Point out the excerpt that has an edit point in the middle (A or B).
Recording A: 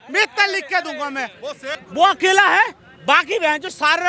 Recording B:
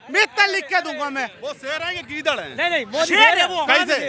A